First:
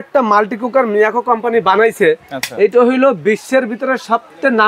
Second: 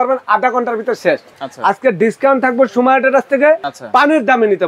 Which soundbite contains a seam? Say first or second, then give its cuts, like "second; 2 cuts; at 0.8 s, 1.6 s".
second; 2 cuts; at 1.3 s, 3.7 s